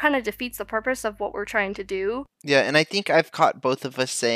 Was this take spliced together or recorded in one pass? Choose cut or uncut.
cut